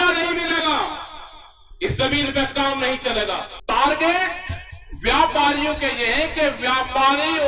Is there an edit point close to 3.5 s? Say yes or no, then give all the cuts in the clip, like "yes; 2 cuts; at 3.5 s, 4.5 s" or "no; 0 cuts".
yes; 1 cut; at 3.5 s